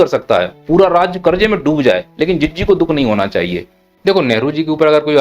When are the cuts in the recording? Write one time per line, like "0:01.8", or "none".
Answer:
0:03.9